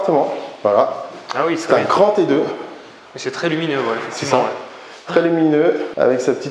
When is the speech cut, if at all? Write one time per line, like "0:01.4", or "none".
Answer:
none